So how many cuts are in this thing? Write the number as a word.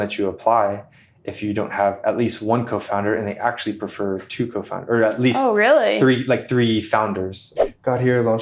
one